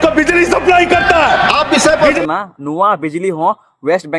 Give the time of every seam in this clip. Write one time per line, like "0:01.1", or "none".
0:02.2